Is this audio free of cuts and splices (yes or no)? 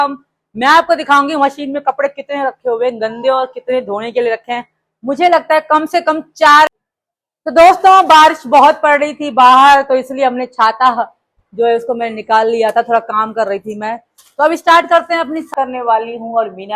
no